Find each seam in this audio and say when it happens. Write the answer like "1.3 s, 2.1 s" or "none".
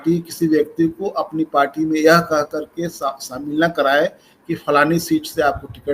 none